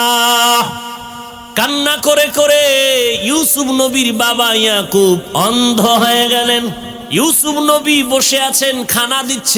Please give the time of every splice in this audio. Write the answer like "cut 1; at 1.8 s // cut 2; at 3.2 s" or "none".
cut 1; at 1.4 s // cut 2; at 6.9 s